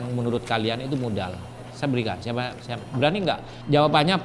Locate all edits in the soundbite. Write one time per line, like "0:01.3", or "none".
0:01.4